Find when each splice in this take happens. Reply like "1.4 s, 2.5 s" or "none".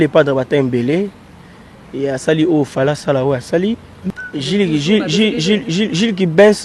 3.9 s